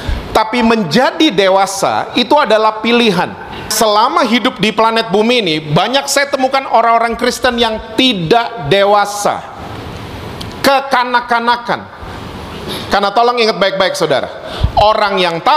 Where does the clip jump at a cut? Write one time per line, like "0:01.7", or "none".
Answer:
0:03.7